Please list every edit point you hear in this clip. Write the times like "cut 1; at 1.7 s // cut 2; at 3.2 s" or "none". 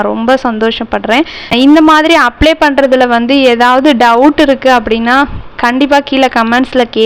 cut 1; at 1.5 s